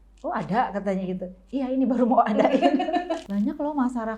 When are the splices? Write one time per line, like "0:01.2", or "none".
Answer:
0:03.2